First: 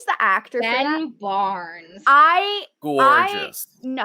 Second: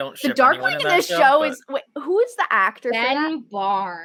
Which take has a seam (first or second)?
first